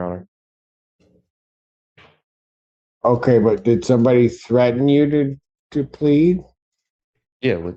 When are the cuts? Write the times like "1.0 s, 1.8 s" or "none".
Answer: none